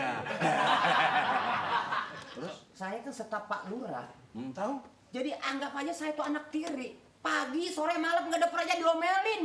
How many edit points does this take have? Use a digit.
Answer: 1